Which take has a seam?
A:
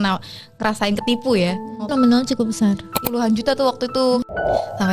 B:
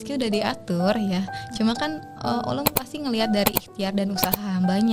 A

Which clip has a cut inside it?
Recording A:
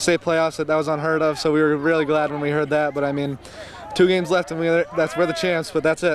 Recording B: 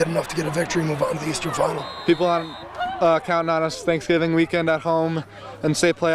B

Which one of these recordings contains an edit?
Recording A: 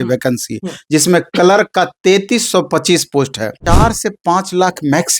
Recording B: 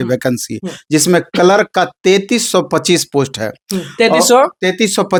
A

